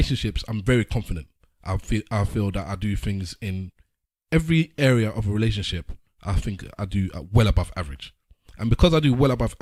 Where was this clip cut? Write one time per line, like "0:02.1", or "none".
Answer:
none